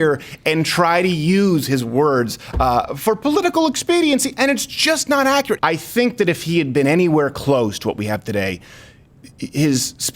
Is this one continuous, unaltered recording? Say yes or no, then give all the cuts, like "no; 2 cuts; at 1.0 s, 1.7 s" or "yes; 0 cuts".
no; 1 cut; at 5.6 s